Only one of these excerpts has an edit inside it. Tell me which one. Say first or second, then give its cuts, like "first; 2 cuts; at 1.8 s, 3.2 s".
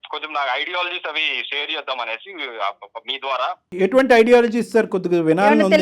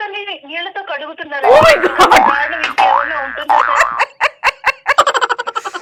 first; 1 cut; at 3.7 s